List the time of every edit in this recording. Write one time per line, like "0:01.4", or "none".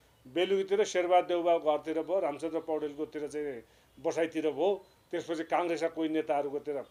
none